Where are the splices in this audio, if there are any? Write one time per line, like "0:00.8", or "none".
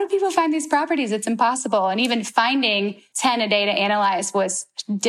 0:03.0